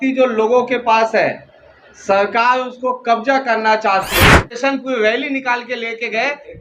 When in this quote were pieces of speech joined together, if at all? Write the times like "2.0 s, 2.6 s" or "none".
4.5 s